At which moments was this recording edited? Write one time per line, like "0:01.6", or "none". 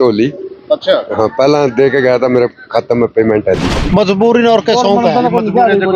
0:03.7